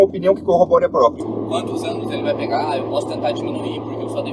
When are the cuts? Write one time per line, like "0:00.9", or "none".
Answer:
0:01.2